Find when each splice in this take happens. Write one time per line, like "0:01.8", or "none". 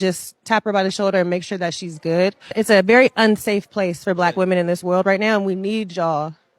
0:05.6